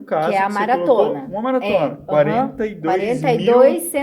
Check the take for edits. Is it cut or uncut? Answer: uncut